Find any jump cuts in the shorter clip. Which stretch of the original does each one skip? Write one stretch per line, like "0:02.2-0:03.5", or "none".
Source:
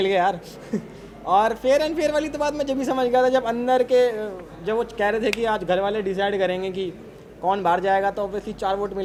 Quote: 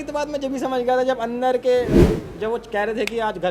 none